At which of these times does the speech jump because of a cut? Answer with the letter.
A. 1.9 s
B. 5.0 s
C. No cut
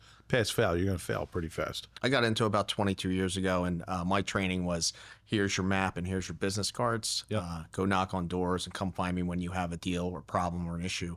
A